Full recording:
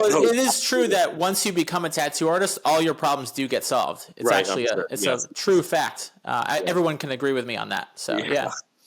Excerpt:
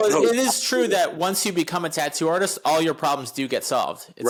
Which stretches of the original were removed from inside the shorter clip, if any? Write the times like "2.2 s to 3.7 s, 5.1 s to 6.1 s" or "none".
none